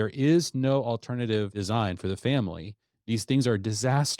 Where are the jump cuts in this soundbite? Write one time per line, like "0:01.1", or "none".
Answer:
0:01.5
0:02.9